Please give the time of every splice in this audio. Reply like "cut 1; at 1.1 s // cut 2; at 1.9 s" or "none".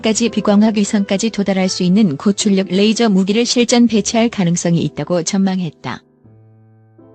cut 1; at 6.0 s